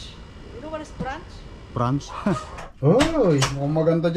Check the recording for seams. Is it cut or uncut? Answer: cut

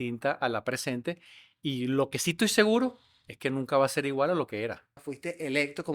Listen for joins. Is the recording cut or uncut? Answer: cut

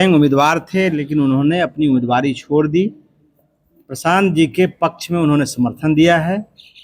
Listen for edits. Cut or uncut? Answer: uncut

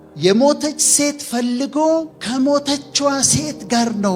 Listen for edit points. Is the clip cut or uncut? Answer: uncut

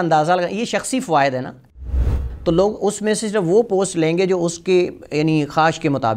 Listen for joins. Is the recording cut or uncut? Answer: cut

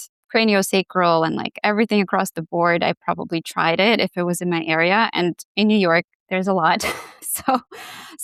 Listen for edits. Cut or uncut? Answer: uncut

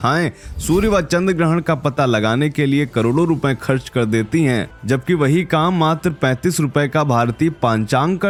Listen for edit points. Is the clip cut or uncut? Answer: uncut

